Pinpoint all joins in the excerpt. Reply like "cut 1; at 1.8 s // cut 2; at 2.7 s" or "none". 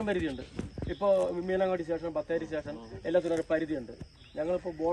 none